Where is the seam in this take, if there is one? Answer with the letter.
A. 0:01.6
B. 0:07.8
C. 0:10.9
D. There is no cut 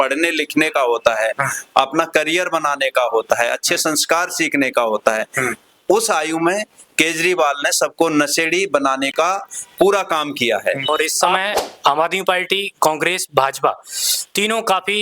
C